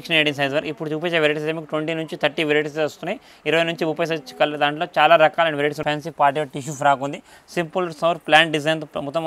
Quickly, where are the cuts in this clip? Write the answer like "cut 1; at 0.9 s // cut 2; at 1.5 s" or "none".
cut 1; at 5.8 s